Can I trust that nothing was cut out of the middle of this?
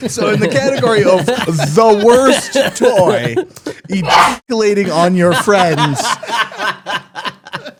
yes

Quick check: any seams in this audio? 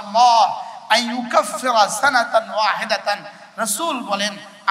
no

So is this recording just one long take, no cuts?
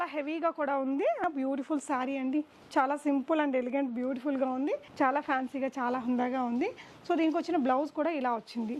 no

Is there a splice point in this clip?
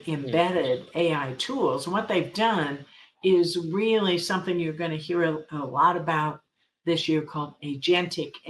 no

